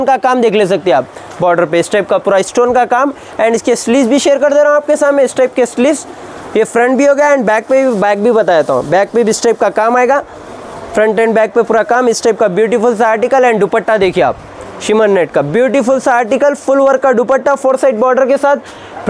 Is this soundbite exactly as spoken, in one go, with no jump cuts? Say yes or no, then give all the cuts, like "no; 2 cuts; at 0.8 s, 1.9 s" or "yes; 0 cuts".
yes; 0 cuts